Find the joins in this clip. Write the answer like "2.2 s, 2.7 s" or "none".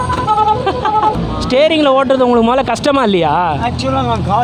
1.2 s